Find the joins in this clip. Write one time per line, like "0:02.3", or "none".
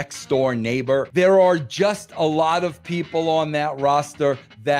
0:01.1